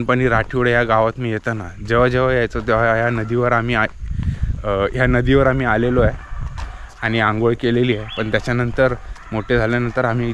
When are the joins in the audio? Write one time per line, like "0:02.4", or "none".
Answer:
none